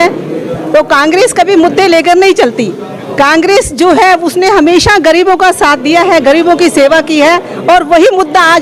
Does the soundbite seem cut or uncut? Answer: uncut